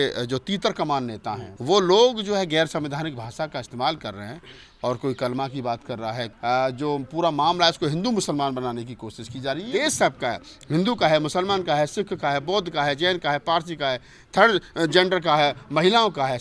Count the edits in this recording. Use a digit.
3